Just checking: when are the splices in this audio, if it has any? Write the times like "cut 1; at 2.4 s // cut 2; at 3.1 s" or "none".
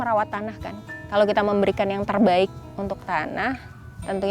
cut 1; at 2.6 s